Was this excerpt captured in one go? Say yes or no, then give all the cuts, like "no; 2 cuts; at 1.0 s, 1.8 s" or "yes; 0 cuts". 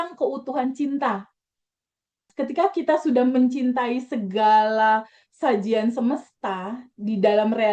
no; 1 cut; at 2.3 s